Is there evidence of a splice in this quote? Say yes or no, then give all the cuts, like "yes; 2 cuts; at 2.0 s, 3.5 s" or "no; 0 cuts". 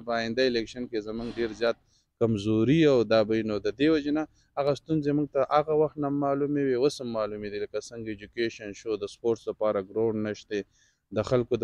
no; 0 cuts